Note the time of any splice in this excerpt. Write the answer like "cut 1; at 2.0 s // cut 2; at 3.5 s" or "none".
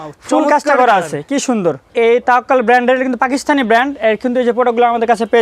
cut 1; at 1.8 s